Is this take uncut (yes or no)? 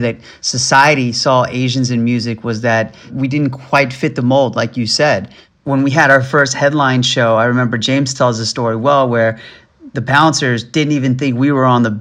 yes